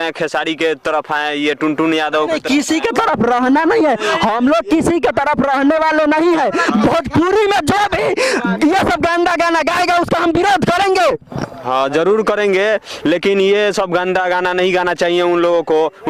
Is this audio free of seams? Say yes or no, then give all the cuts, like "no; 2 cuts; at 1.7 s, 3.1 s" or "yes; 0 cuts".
yes; 0 cuts